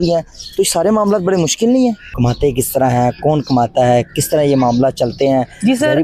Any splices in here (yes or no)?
yes